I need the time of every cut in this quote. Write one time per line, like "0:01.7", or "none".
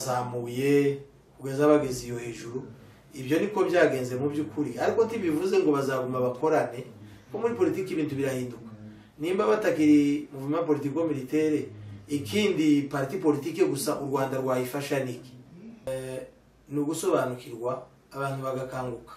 0:15.9

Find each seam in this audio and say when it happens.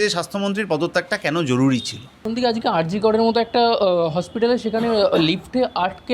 0:02.2

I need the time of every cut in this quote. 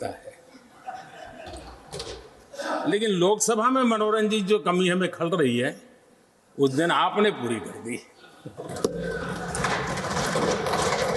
none

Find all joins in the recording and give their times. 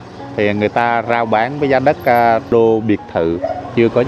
0:02.5

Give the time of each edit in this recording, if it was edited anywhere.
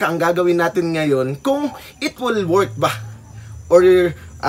none

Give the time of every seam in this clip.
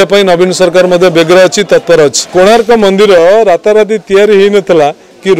0:02.3

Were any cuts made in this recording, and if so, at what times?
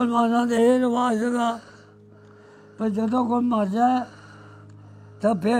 none

